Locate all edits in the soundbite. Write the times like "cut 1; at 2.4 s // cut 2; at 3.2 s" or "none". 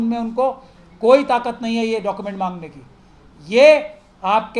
none

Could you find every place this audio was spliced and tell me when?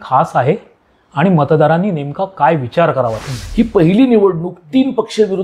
cut 1; at 3.2 s

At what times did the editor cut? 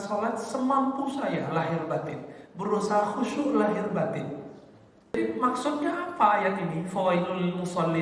cut 1; at 5.2 s

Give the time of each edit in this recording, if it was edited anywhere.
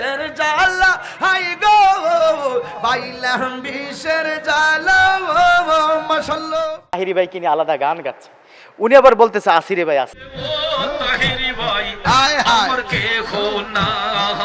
cut 1; at 7.0 s

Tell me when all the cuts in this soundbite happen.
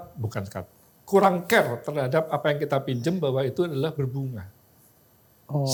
none

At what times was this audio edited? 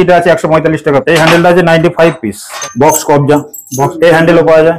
cut 1; at 1.0 s // cut 2; at 2.5 s // cut 3; at 3.9 s

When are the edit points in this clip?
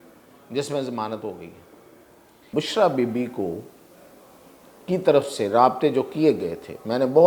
cut 1; at 2.5 s

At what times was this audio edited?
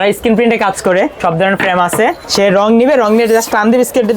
cut 1; at 1.1 s // cut 2; at 2.2 s

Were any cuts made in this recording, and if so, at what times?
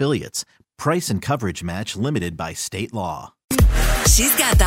cut 1; at 3.6 s

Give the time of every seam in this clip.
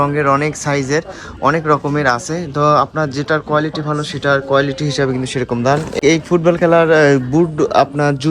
cut 1; at 6.0 s

